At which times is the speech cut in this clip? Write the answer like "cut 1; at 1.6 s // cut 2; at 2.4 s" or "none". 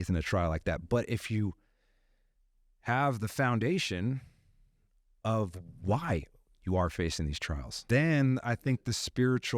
cut 1; at 7.9 s